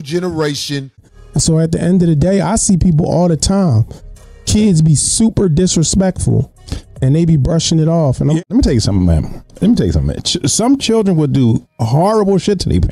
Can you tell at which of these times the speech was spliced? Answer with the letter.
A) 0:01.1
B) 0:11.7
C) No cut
A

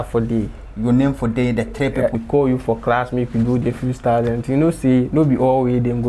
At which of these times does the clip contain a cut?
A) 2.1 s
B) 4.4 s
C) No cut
A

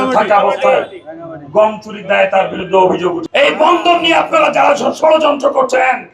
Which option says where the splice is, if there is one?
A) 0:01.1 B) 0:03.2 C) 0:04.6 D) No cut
B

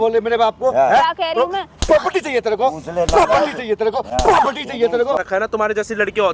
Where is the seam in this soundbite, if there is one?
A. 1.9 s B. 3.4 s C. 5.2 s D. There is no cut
C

